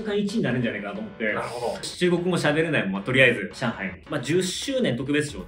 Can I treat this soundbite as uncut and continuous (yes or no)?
no